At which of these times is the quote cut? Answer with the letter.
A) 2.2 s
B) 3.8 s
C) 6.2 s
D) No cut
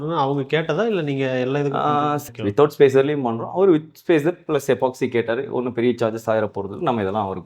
A